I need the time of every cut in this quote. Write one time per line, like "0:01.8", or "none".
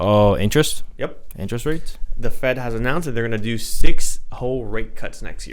none